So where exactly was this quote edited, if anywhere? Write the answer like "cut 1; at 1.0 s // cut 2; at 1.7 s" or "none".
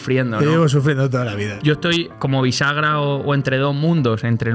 cut 1; at 1.5 s // cut 2; at 2.1 s